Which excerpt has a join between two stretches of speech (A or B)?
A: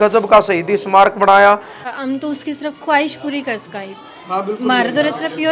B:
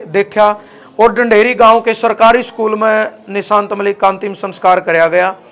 A